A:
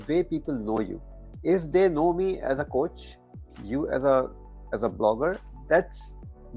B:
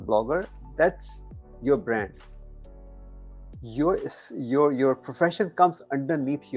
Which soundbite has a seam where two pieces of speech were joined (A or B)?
A